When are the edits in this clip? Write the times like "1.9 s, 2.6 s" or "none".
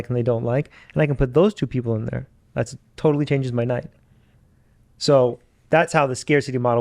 none